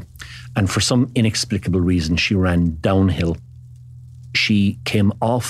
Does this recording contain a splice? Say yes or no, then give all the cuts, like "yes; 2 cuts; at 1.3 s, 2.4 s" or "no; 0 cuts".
yes; 1 cut; at 4.1 s